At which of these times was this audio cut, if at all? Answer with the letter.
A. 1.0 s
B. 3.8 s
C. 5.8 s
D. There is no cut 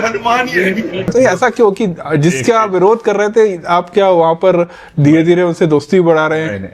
A